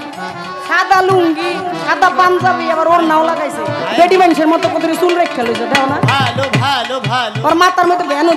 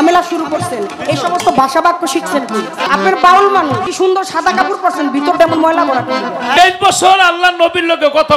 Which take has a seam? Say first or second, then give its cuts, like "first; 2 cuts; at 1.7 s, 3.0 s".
second; 3 cuts; at 2.8 s, 3.9 s, 6.5 s